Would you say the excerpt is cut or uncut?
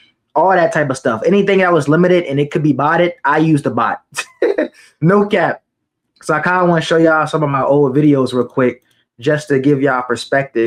uncut